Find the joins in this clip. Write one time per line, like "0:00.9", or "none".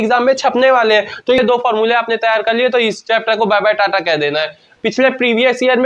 0:01.4
0:04.6